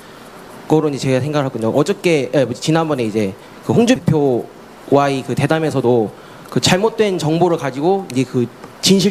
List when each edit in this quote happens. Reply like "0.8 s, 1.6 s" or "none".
7.1 s